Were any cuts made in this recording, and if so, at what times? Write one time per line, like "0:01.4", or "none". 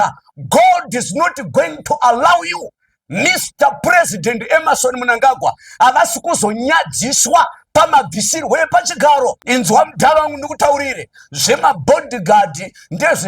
0:09.4